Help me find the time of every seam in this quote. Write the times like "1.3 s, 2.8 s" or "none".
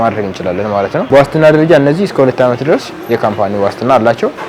1.1 s